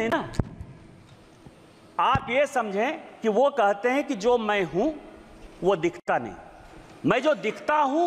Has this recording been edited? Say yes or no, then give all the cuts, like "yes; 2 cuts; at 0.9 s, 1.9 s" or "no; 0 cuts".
no; 0 cuts